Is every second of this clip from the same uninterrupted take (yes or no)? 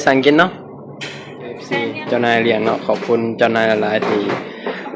no